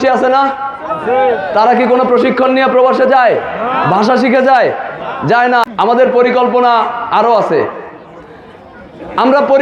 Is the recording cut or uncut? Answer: cut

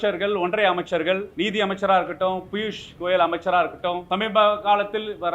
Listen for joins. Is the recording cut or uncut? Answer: cut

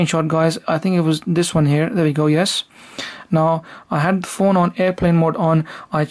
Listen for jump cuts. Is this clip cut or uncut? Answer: cut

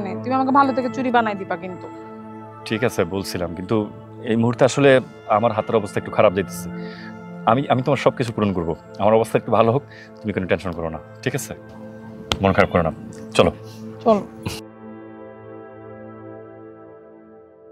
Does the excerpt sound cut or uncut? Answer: uncut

